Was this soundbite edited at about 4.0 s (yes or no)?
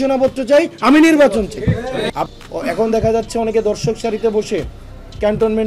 no